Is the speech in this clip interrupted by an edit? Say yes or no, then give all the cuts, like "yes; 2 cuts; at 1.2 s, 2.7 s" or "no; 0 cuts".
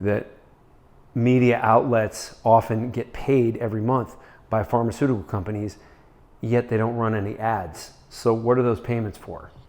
no; 0 cuts